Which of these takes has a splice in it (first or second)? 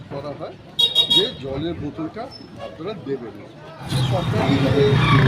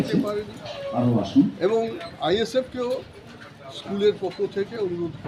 first